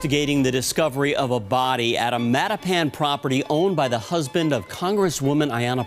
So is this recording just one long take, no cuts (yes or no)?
yes